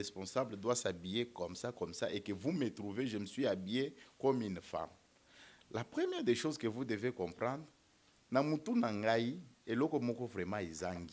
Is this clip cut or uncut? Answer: uncut